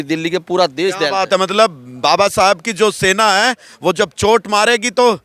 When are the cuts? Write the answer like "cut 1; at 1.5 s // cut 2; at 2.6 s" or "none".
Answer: none